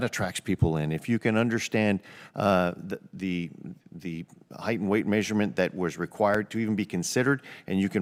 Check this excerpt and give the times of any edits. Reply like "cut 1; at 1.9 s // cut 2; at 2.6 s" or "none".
none